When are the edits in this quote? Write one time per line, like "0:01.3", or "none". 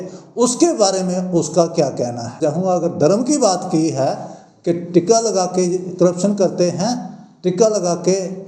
0:02.4